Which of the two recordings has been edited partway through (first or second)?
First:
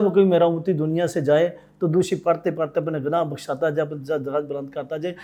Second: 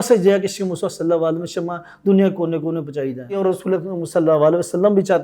second